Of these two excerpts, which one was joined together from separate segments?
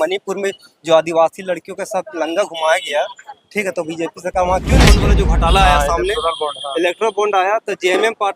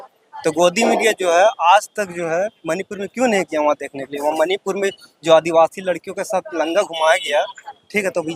first; 1 cut; at 5.1 s

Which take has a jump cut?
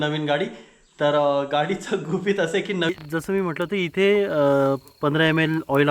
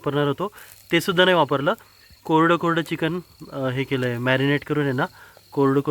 first; 1 cut; at 2.9 s

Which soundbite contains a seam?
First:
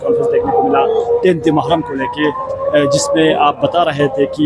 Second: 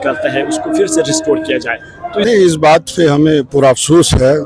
second; 1 cut; at 2.3 s

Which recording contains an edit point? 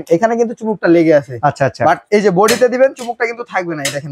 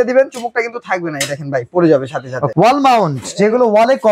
second; 1 cut; at 2.5 s

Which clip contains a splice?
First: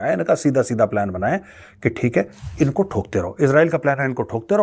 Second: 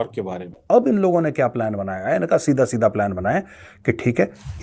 second; 1 cut; at 0.9 s

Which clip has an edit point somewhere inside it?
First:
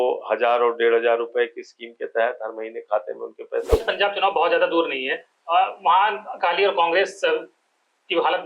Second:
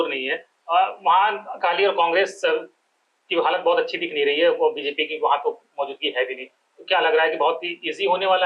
first; 1 cut; at 3.7 s

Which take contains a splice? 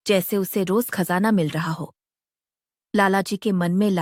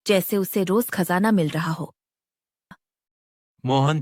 second; 1 cut; at 2.7 s

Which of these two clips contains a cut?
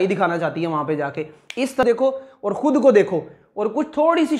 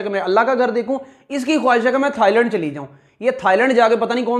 first; 1 cut; at 1.8 s

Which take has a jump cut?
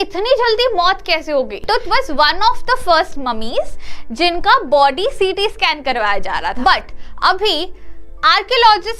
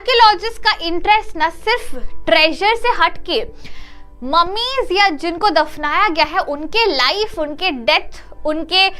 first; 2 cuts; at 1.6 s, 6.6 s

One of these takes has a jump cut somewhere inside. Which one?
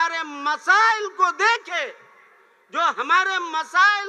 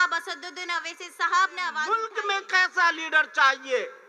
second; 1 cut; at 1.9 s

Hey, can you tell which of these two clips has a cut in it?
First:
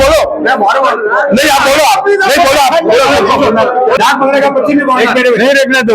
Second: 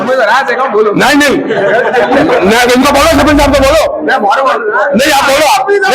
first; 1 cut; at 4.0 s

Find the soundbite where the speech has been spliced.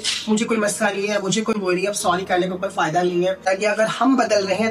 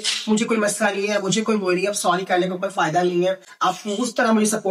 first; 1 cut; at 3.4 s

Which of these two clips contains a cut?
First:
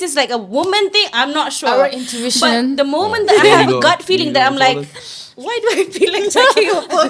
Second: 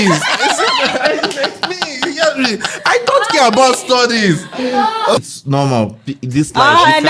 second; 1 cut; at 5.2 s

